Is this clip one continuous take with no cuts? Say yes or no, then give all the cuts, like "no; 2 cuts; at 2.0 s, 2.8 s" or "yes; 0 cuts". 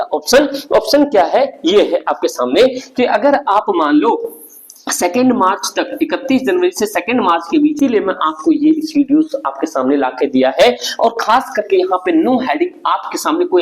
no; 1 cut; at 7.8 s